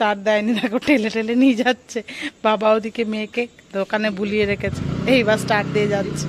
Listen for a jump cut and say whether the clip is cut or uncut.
uncut